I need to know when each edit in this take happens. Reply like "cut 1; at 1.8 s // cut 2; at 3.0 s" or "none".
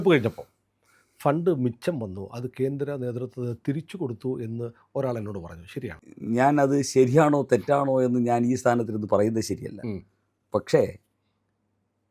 cut 1; at 6.1 s